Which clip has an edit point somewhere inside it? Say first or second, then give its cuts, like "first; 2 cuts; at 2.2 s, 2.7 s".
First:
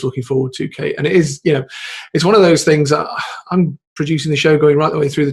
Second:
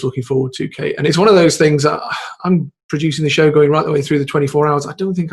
second; 1 cut; at 1.1 s